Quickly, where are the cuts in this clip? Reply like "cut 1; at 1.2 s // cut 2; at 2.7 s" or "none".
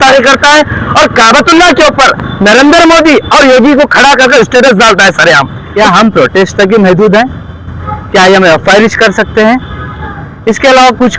cut 1; at 5.6 s